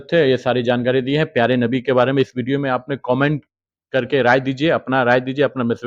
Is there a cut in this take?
no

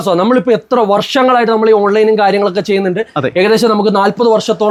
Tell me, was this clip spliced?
no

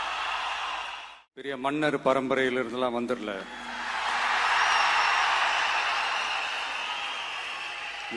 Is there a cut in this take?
yes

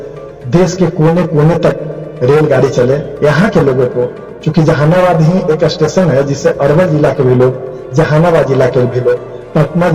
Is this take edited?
no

